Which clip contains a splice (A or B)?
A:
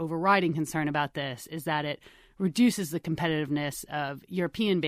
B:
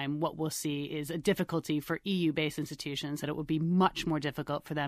B